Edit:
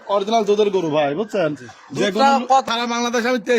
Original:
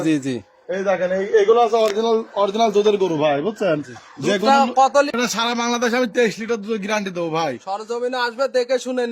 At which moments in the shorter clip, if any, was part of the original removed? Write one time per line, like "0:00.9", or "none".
0:02.6